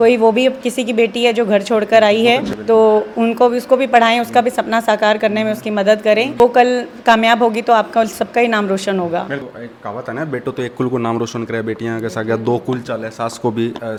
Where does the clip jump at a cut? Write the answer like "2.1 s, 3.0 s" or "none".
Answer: none